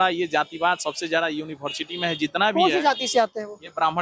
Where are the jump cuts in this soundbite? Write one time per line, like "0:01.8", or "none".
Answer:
none